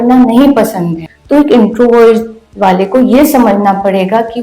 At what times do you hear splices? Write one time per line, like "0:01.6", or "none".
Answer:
0:01.0